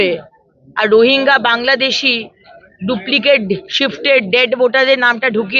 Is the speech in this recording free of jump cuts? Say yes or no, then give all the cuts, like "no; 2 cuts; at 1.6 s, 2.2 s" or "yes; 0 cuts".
yes; 0 cuts